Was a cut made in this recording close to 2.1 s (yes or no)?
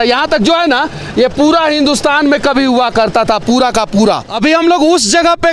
no